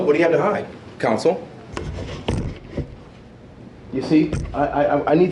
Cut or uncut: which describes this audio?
uncut